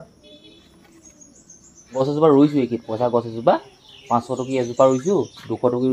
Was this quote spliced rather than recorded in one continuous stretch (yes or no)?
yes